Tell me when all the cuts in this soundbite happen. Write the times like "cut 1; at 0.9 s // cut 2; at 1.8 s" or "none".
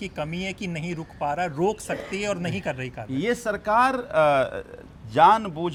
none